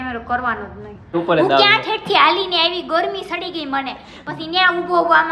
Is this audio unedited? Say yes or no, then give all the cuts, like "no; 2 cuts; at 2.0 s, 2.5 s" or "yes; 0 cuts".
no; 1 cut; at 1.1 s